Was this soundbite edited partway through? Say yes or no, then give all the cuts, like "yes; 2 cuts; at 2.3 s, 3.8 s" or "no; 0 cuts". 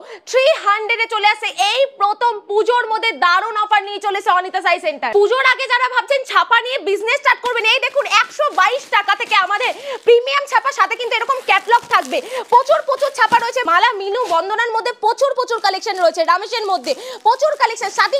no; 0 cuts